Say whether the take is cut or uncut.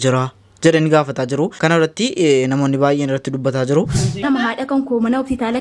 cut